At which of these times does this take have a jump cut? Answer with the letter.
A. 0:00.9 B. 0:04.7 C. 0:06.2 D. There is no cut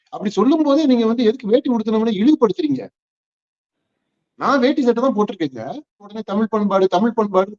C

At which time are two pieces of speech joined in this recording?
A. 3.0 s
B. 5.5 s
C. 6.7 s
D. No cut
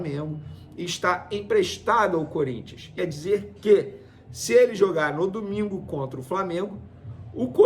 A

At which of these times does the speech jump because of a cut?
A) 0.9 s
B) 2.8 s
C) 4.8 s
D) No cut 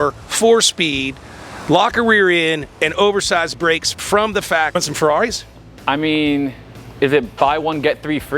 C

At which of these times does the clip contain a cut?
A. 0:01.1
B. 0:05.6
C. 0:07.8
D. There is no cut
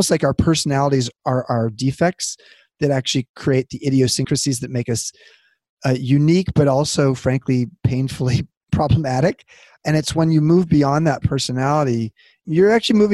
A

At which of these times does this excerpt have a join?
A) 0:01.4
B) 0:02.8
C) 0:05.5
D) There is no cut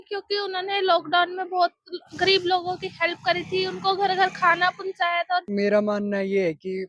C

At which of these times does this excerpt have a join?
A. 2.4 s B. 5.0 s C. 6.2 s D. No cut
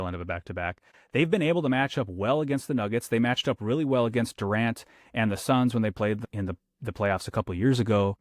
C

